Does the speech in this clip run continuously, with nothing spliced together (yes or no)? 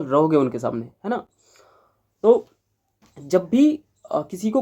yes